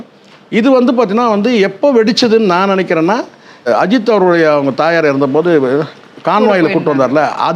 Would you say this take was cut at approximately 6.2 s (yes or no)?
no